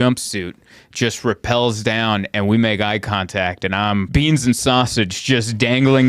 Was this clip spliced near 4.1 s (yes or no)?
yes